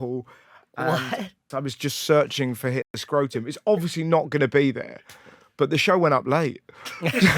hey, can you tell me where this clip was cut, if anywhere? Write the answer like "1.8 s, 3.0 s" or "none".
1.4 s